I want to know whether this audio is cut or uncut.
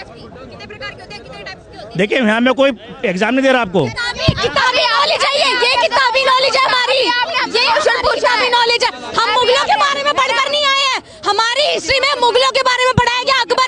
uncut